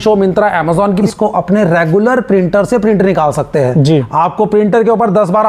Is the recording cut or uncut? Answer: cut